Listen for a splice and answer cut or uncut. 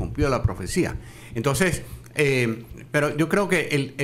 cut